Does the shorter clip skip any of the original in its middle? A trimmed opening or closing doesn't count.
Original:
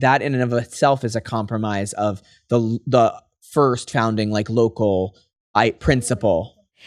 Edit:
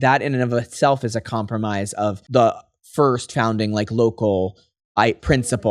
yes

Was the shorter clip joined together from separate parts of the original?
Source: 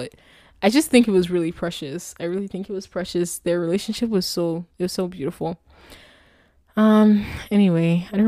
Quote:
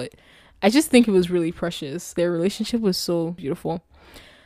yes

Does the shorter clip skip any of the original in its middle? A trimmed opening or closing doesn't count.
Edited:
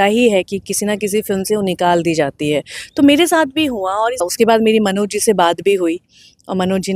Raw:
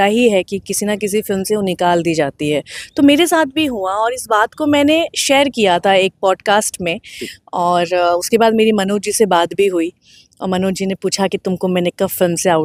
yes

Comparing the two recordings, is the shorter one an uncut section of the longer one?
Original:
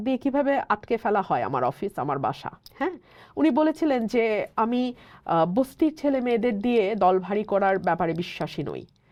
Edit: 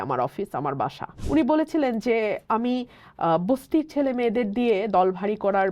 no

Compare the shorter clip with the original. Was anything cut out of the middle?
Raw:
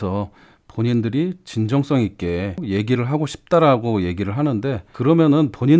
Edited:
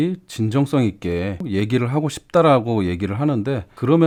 no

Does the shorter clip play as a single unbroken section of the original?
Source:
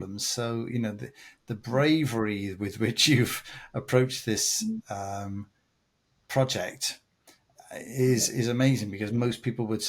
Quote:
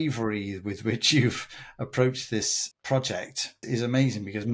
no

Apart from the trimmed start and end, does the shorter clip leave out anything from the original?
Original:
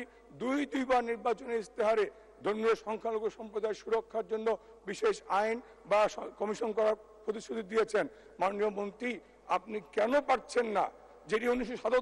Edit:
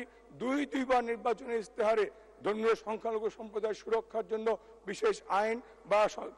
no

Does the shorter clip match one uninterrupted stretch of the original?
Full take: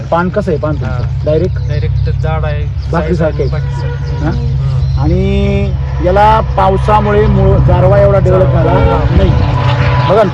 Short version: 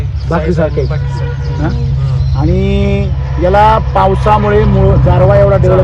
yes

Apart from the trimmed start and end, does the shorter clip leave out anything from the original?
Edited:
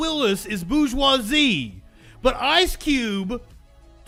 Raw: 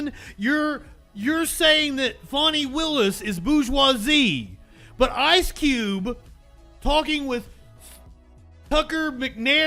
no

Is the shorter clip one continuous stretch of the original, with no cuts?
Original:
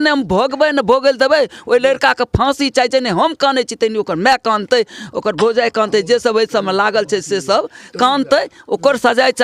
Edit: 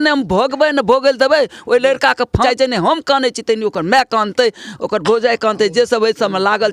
no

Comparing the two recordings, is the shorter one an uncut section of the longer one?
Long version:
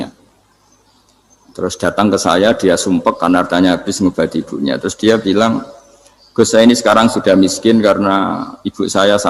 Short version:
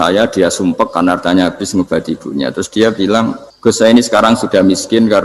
no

